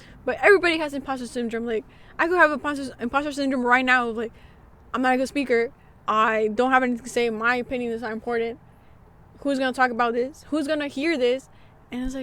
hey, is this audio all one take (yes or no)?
yes